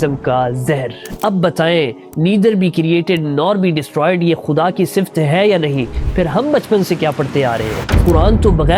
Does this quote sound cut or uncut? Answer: cut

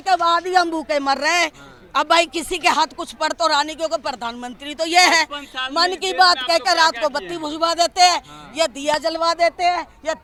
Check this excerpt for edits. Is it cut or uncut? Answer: uncut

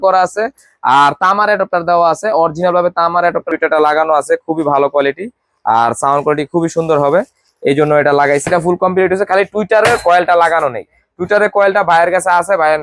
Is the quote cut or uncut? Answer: cut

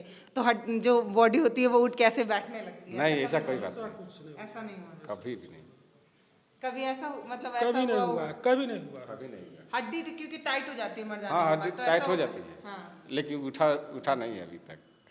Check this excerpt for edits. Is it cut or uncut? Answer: uncut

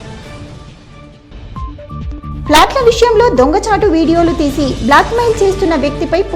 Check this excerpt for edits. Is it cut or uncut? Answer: cut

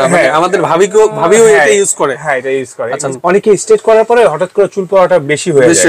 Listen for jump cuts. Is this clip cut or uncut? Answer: cut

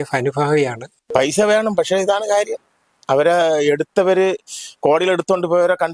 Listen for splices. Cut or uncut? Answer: cut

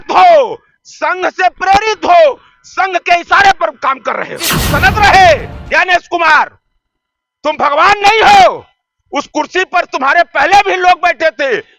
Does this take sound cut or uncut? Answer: cut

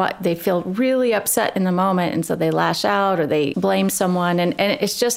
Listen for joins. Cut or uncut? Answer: cut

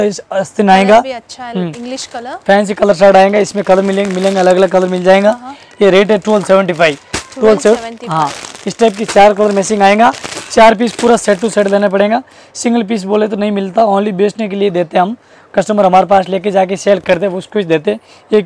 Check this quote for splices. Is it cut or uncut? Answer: uncut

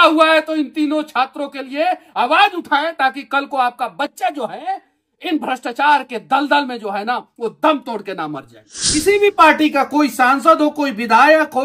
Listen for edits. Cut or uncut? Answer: cut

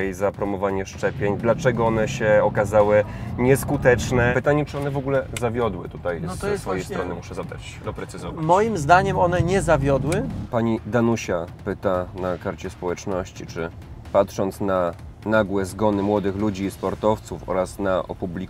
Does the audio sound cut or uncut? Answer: cut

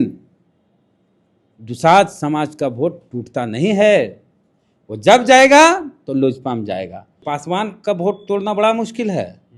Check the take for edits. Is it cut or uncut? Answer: cut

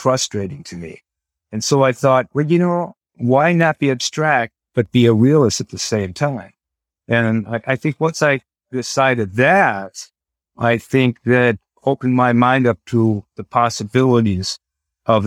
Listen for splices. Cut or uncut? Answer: uncut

